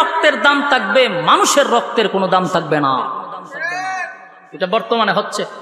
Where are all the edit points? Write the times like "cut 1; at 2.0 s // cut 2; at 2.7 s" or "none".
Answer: none